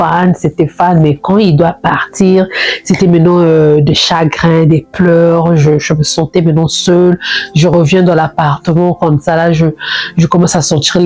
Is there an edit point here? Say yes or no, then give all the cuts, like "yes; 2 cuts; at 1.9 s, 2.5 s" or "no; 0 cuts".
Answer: no; 0 cuts